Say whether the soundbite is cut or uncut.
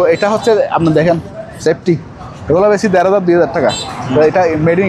uncut